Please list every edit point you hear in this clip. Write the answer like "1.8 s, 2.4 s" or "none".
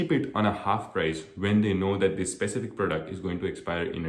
none